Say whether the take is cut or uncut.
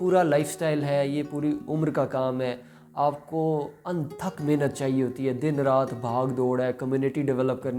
uncut